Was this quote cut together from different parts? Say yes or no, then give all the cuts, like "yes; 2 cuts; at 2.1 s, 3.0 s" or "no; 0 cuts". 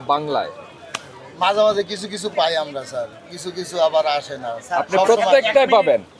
no; 0 cuts